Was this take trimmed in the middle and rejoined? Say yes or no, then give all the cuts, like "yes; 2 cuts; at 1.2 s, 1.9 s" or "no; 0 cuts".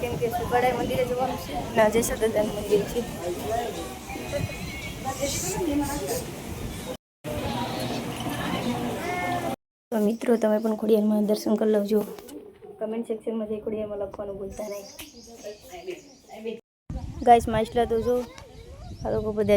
yes; 3 cuts; at 7.0 s, 9.7 s, 16.7 s